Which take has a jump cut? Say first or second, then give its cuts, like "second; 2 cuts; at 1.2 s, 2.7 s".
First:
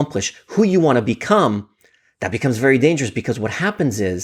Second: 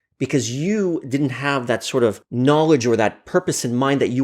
second; 1 cut; at 2.2 s